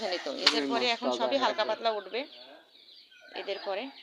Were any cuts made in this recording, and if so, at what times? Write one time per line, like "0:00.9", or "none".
none